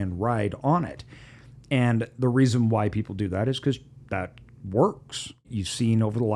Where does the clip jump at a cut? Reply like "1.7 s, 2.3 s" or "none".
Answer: 5.4 s